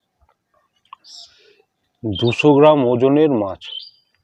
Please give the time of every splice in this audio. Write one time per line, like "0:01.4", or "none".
none